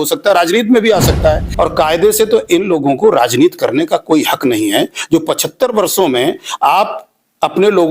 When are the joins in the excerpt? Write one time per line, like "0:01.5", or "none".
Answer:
0:01.5